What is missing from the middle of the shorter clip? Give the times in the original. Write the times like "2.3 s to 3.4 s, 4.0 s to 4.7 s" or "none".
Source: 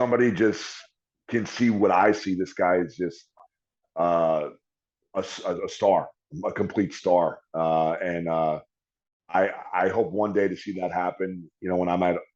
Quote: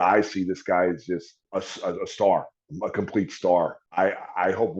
3.3 s to 5.0 s, 7.4 s to 9.2 s